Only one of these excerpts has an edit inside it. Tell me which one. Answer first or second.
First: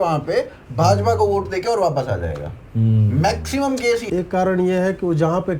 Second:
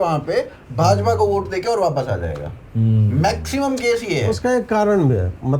first